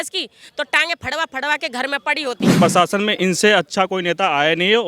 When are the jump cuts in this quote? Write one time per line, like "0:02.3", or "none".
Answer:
0:02.5